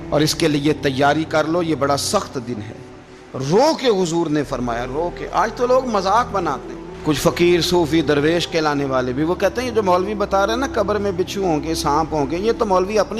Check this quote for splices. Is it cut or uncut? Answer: uncut